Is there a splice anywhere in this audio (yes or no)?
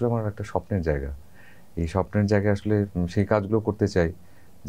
no